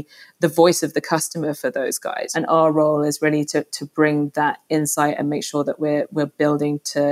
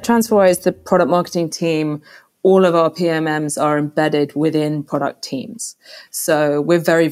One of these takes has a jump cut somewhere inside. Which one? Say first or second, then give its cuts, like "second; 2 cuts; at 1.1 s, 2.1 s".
first; 1 cut; at 2.2 s